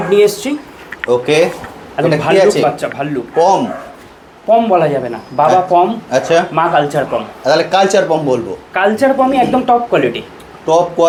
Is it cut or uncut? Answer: uncut